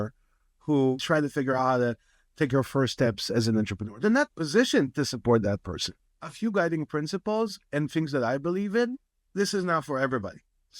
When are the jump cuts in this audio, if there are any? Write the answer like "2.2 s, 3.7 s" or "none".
1.0 s, 6.0 s